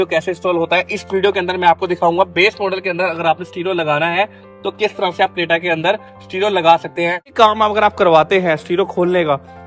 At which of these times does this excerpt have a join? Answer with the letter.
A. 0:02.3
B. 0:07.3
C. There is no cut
B